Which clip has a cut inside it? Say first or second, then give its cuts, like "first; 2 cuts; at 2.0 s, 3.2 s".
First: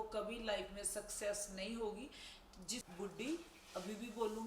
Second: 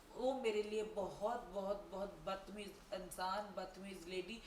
first; 1 cut; at 2.8 s